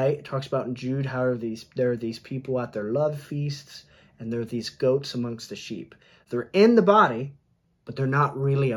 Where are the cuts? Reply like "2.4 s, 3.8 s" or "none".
none